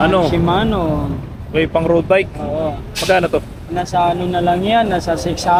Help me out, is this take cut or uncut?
uncut